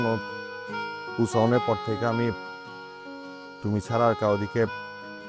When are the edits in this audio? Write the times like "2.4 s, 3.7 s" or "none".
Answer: none